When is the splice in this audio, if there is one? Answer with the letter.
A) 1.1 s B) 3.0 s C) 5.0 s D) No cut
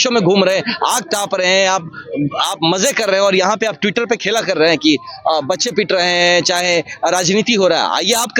D